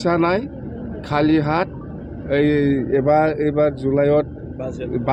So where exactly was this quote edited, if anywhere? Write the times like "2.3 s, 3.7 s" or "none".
none